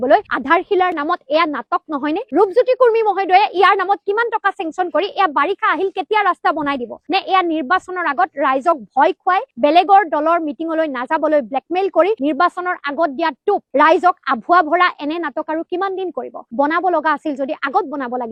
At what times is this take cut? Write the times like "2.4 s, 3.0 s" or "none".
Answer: none